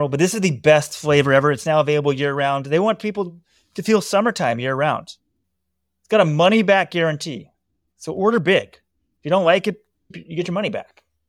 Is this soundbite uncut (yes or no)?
no